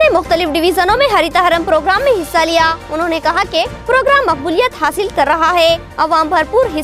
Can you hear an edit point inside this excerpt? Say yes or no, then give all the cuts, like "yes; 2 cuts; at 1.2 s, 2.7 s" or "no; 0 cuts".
no; 0 cuts